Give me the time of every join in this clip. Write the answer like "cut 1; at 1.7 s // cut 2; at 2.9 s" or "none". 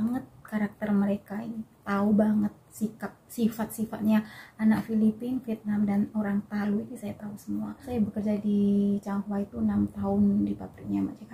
cut 1; at 7.9 s